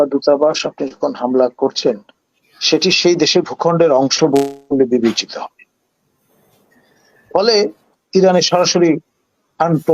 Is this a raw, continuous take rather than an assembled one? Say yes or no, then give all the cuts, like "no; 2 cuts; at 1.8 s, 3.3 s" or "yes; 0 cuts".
yes; 0 cuts